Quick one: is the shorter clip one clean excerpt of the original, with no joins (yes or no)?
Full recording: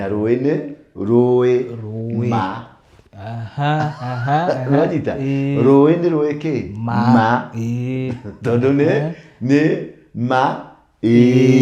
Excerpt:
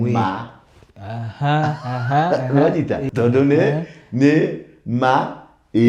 no